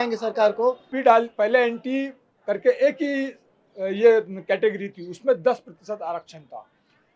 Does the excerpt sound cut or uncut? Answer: cut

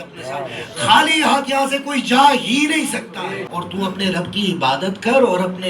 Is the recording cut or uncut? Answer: cut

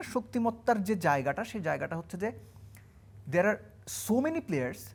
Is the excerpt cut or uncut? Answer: uncut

